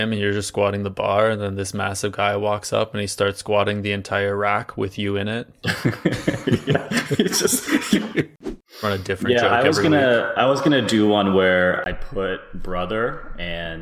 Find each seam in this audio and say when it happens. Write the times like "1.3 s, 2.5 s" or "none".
8.3 s